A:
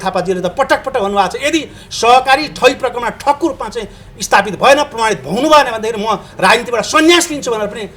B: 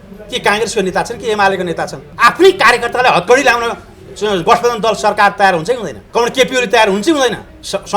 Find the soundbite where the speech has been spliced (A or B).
B